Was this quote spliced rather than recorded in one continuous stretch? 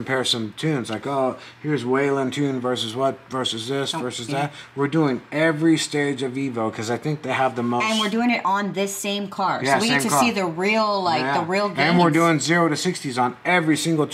no; 0 cuts

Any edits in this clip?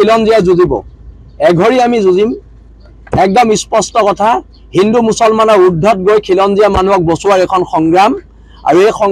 no; 0 cuts

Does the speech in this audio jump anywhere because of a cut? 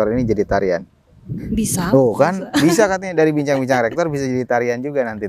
no; 0 cuts

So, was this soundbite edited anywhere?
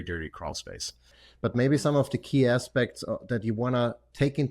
yes; 1 cut; at 1.1 s

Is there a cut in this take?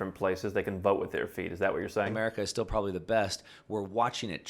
yes; 1 cut; at 2.1 s

